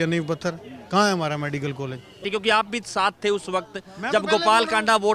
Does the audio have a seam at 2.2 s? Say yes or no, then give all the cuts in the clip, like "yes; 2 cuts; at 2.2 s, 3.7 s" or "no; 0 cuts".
yes; 1 cut; at 2.2 s